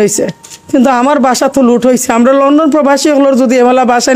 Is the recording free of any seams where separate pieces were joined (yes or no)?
yes